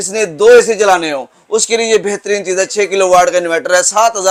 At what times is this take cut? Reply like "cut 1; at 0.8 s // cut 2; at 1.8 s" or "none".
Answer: none

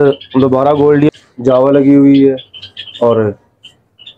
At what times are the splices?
cut 1; at 1.1 s

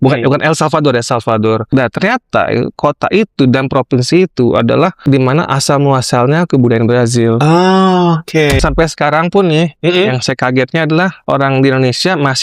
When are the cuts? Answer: cut 1; at 1.6 s // cut 2; at 5.0 s // cut 3; at 8.6 s

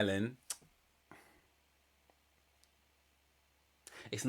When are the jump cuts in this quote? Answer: none

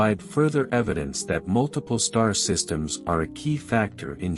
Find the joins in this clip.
none

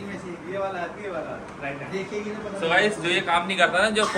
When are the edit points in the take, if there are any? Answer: none

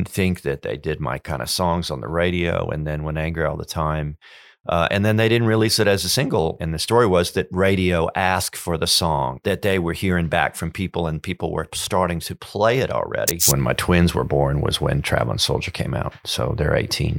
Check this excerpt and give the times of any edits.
cut 1; at 6.6 s // cut 2; at 9.4 s // cut 3; at 13.4 s

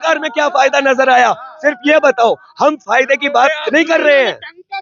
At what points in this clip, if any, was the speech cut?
none

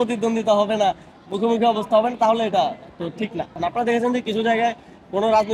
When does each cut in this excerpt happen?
cut 1; at 3.6 s

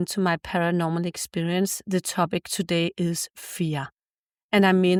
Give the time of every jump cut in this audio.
none

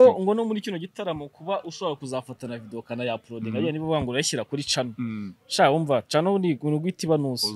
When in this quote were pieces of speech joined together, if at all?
none

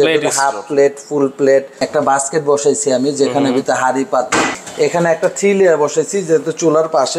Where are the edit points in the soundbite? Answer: cut 1; at 1.8 s // cut 2; at 4.6 s

